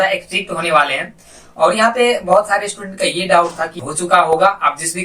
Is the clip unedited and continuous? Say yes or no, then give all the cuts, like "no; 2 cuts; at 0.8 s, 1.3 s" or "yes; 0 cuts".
no; 1 cut; at 3.8 s